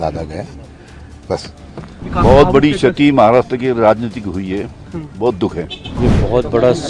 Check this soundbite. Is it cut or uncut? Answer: cut